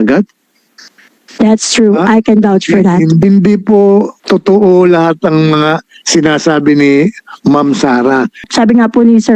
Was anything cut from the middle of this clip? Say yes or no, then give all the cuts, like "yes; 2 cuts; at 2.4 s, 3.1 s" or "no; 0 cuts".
yes; 3 cuts; at 3.2 s, 4.2 s, 8.5 s